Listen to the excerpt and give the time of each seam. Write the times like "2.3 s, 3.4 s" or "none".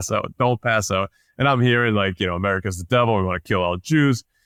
none